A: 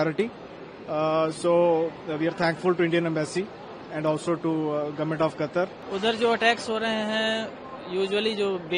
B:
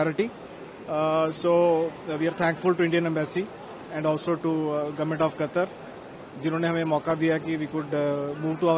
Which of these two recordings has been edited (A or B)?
A